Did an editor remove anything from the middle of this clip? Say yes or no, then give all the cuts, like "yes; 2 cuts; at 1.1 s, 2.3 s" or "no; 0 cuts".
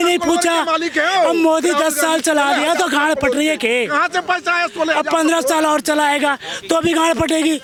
no; 0 cuts